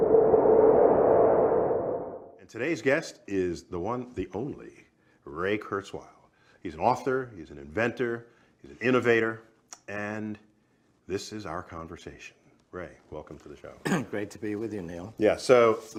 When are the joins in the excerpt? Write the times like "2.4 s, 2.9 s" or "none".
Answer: none